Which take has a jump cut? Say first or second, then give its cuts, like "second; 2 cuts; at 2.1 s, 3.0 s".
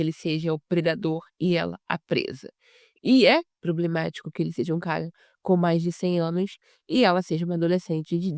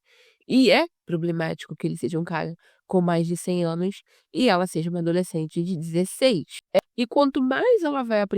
second; 1 cut; at 6.8 s